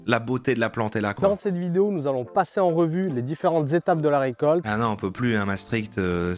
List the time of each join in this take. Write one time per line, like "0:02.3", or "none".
0:01.1
0:04.7